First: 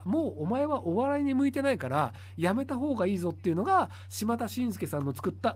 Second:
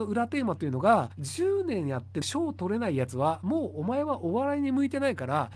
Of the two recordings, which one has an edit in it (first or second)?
second